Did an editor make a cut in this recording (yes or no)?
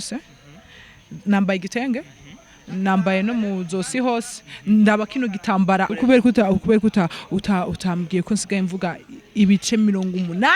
yes